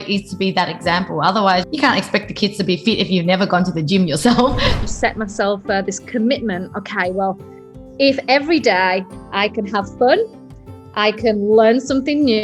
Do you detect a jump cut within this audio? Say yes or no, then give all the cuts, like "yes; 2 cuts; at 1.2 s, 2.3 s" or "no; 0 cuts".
yes; 1 cut; at 4.8 s